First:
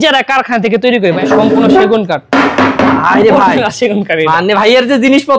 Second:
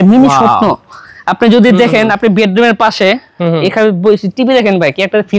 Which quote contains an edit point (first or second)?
first